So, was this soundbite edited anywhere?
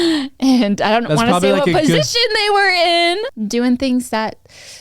yes; 1 cut; at 3.3 s

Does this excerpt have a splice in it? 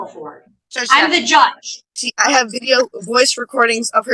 yes; 1 cut; at 1.9 s

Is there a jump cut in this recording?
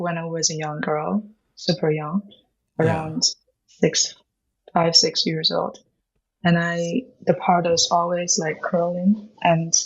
no; 0 cuts

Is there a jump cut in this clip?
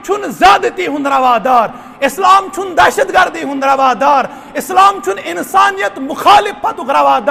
no; 0 cuts

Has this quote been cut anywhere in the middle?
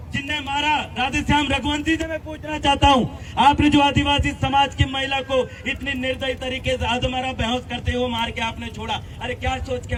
no; 0 cuts

